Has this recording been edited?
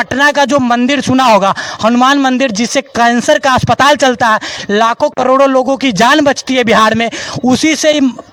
no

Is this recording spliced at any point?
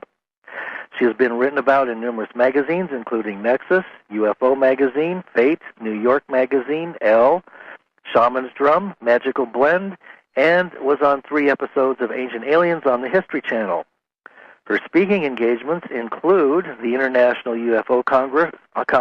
no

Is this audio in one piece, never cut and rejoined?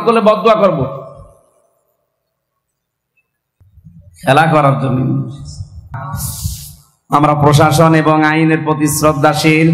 no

